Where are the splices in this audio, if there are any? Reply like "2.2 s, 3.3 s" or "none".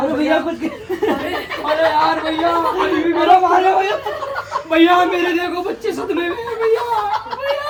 none